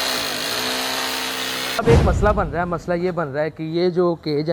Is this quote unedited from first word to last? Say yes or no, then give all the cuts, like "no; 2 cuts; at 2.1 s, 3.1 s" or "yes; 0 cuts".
no; 1 cut; at 1.8 s